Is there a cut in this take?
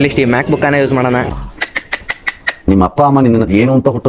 no; 0 cuts

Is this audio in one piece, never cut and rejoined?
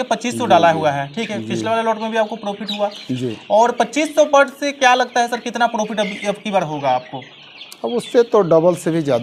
yes; 0 cuts

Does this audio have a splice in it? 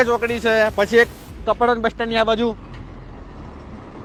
no; 0 cuts

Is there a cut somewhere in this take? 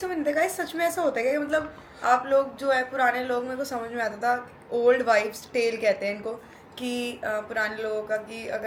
no; 0 cuts

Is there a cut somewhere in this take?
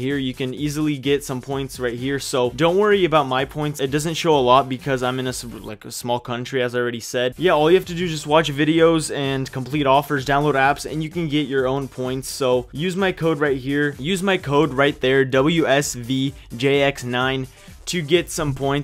no; 0 cuts

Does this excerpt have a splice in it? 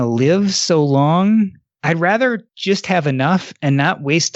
yes; 2 cuts; at 1.7 s, 2.5 s

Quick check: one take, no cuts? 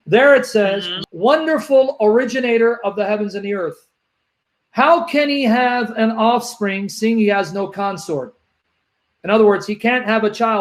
no; 1 cut; at 0.9 s

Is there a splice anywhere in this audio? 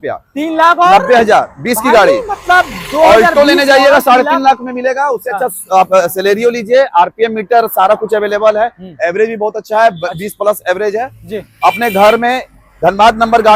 no; 0 cuts

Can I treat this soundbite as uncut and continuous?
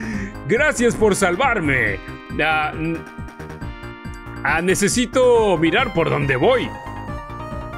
yes; 0 cuts

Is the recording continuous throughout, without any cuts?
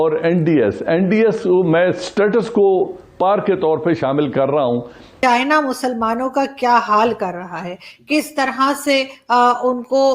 no; 1 cut; at 5.0 s

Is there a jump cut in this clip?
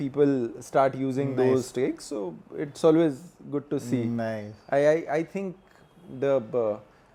no; 0 cuts

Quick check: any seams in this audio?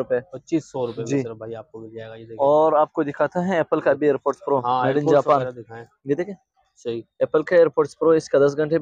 no; 0 cuts

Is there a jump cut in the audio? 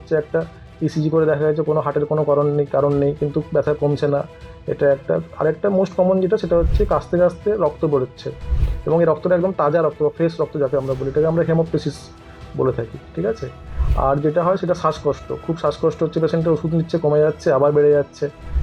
no; 0 cuts

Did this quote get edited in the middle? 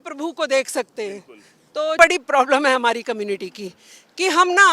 yes; 1 cut; at 2.0 s

